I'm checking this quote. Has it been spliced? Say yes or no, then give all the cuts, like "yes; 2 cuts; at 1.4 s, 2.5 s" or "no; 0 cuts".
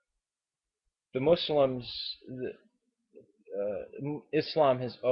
yes; 1 cut; at 3.1 s